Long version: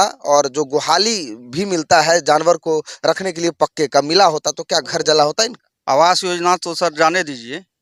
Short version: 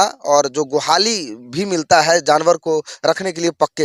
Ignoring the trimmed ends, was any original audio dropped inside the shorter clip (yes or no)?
no